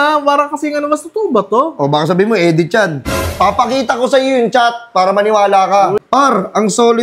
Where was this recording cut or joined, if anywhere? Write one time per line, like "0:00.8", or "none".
0:06.0